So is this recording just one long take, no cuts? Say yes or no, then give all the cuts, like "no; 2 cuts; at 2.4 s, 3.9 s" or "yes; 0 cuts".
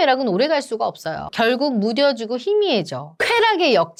yes; 0 cuts